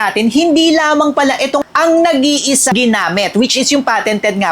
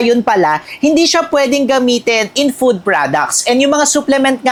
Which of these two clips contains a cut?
first; 2 cuts; at 1.6 s, 2.7 s

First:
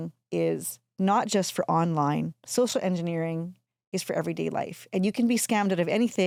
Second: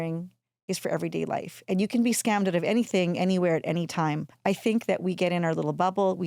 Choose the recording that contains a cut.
second; 1 cut; at 4.3 s

